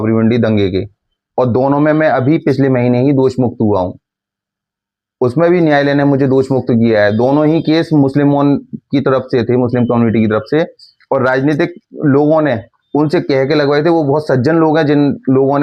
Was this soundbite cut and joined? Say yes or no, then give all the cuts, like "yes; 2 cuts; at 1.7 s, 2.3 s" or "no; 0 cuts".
no; 0 cuts